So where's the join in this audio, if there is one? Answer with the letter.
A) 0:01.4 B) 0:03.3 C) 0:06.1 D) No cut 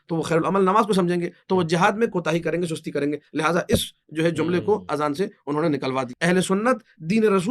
C